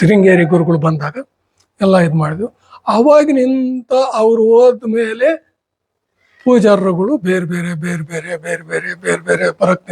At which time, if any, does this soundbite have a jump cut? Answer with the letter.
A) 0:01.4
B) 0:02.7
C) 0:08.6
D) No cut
D